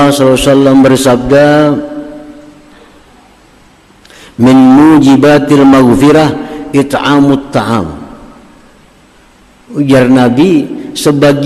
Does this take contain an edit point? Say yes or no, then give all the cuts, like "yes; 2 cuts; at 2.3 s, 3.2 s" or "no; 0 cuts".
no; 0 cuts